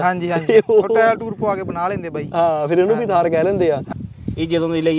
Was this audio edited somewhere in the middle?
yes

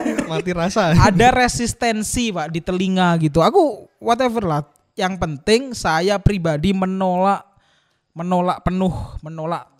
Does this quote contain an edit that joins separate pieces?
no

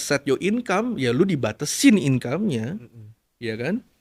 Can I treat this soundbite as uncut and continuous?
yes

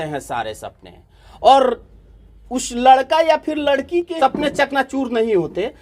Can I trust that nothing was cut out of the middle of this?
no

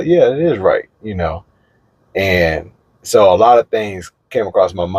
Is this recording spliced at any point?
no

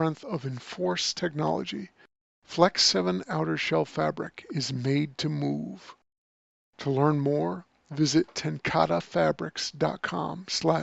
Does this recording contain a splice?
no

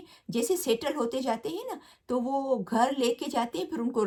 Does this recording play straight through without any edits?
yes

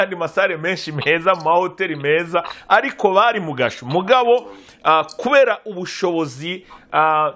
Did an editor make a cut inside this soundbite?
no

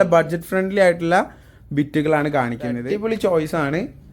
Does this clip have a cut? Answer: yes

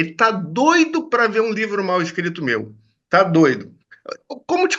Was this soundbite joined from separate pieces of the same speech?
no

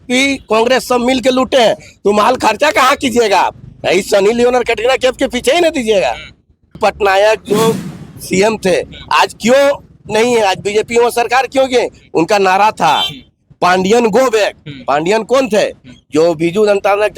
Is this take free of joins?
no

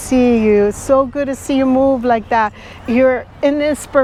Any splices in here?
no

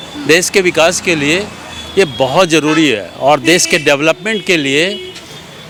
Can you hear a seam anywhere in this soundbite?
no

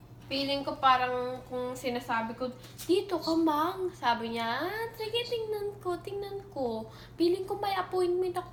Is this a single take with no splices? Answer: yes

